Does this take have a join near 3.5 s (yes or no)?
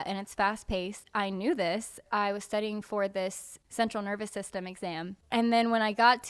yes